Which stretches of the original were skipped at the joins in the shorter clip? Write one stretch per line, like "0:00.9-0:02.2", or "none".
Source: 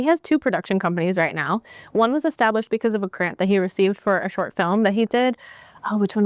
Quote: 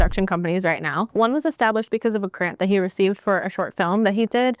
0:01.6-0:01.9